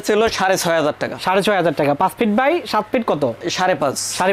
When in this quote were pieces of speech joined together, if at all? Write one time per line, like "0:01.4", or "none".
0:03.4